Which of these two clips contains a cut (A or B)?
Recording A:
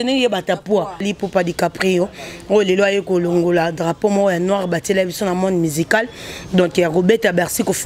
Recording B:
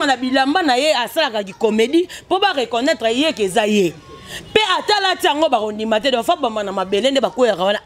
A